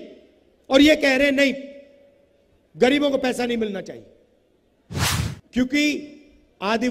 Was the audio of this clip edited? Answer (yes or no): yes